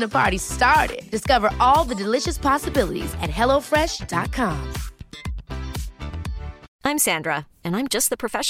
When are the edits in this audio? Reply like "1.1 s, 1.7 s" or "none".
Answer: 6.7 s